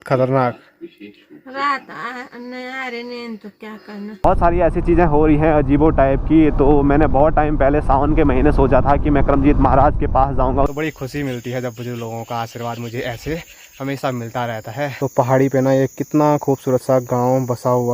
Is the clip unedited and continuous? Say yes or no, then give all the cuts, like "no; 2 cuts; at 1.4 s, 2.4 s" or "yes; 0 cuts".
no; 3 cuts; at 4.2 s, 10.7 s, 14.9 s